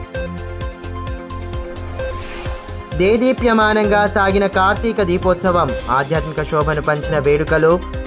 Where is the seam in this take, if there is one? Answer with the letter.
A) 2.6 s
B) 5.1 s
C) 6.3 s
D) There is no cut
A